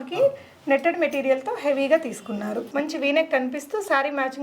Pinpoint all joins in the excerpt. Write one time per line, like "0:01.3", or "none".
0:02.7